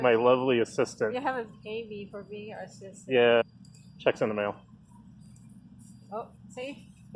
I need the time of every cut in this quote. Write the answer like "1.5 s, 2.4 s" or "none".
3.4 s